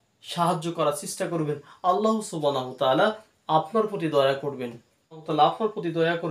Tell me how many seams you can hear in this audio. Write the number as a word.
one